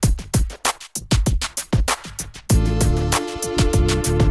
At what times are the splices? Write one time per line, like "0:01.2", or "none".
0:01.8